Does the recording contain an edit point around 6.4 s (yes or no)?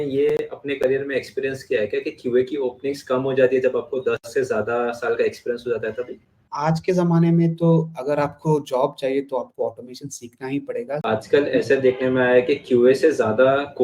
yes